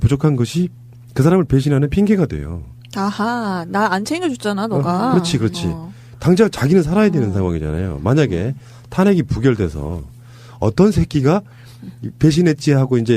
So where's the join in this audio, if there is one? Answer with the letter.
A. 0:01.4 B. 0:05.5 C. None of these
B